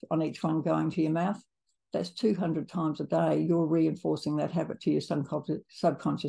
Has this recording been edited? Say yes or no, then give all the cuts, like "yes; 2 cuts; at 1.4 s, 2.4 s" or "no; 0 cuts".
no; 0 cuts